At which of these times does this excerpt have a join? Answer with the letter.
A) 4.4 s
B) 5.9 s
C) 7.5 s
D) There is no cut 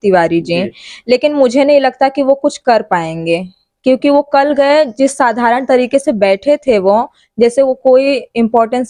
D